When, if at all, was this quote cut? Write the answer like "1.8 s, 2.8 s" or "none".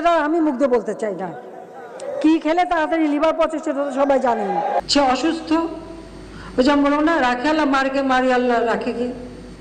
4.9 s